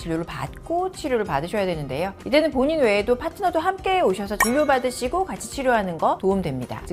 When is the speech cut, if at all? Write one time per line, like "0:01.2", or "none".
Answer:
none